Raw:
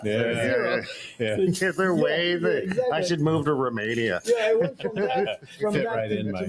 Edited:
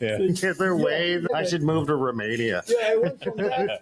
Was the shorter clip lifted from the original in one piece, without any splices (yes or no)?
no